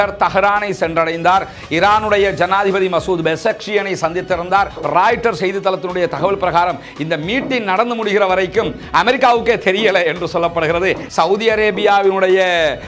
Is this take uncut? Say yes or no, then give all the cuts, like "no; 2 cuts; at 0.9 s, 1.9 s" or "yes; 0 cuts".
no; 2 cuts; at 4.7 s, 11.0 s